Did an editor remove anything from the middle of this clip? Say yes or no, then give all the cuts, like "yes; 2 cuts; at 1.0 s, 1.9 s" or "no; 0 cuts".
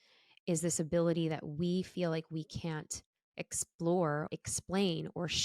yes; 1 cut; at 4.3 s